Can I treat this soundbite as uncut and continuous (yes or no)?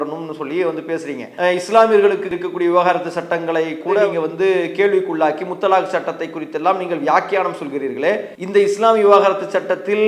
no